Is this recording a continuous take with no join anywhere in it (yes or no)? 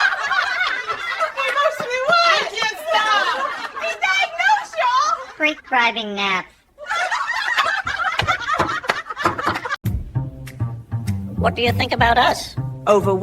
no